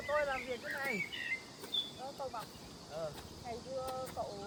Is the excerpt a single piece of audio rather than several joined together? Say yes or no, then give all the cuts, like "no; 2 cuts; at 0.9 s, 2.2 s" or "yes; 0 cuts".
yes; 0 cuts